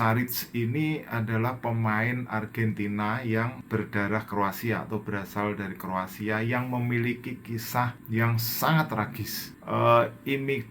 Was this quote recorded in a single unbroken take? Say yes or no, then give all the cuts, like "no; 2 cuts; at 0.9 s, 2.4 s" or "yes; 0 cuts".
no; 3 cuts; at 3.6 s, 8.0 s, 9.6 s